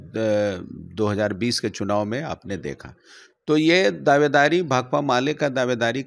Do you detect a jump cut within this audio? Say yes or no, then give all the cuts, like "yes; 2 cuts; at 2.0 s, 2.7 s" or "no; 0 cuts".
no; 0 cuts